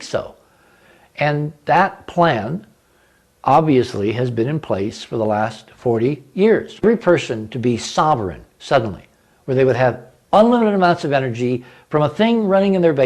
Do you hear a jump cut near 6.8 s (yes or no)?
yes